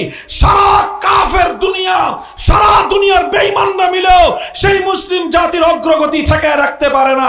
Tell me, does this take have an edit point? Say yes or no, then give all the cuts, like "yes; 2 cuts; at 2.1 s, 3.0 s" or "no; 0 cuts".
no; 0 cuts